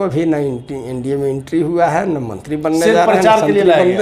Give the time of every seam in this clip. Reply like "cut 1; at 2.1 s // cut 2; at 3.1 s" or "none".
none